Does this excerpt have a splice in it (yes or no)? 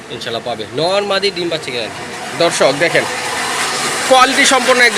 no